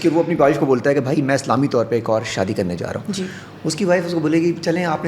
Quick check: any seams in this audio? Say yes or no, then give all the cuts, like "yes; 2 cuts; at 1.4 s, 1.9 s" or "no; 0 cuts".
no; 0 cuts